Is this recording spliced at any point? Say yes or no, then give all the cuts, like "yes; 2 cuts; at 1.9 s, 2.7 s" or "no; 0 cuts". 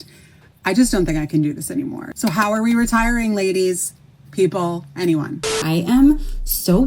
yes; 2 cuts; at 2.0 s, 5.6 s